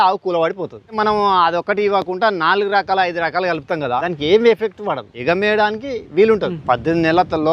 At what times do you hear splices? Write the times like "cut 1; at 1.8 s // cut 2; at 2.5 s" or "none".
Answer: cut 1; at 1.0 s // cut 2; at 4.0 s // cut 3; at 5.1 s // cut 4; at 6.6 s